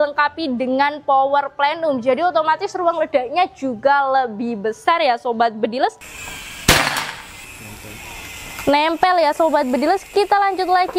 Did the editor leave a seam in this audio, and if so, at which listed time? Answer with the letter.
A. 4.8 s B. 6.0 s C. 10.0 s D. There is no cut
B